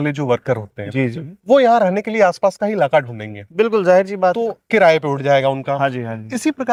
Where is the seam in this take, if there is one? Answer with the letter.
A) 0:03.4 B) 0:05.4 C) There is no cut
C